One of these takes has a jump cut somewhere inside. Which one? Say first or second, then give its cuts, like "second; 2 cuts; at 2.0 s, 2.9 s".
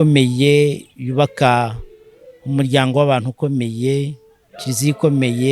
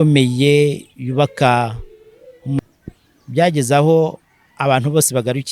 second; 1 cut; at 2.6 s